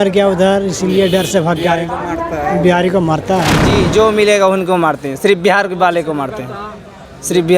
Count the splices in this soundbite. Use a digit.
1